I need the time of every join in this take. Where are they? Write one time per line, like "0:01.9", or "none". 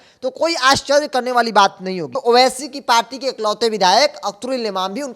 0:02.1